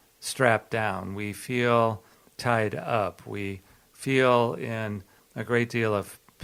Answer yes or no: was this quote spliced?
no